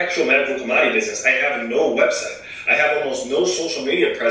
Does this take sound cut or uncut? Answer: uncut